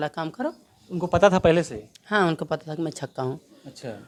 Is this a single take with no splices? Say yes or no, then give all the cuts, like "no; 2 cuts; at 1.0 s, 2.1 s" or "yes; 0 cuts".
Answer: yes; 0 cuts